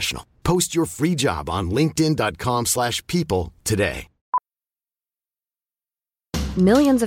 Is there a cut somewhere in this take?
yes; 1 cut; at 4.1 s

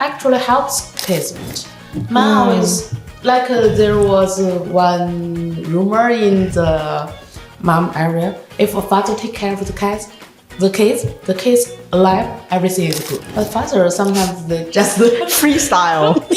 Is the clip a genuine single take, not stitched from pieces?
no; 2 cuts; at 1.5 s, 13.2 s

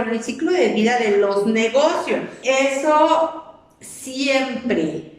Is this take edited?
yes; 1 cut; at 2.4 s

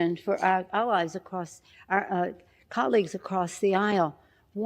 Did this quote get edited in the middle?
no; 0 cuts

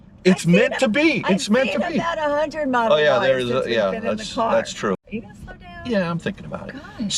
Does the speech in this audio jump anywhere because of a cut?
yes; 1 cut; at 5.0 s

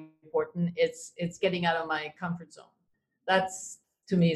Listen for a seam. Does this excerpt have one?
yes; 1 cut; at 3.2 s

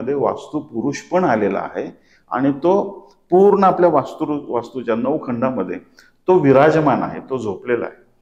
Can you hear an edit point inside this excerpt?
no; 0 cuts

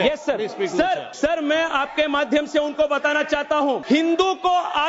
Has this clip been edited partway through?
yes; 2 cuts; at 1.1 s, 3.8 s

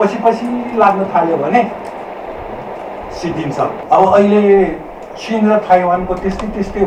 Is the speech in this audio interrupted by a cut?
yes; 1 cut; at 3.8 s

